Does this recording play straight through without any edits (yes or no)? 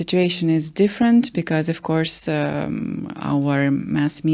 yes